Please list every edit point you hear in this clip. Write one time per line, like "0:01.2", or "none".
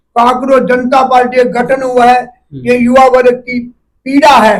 none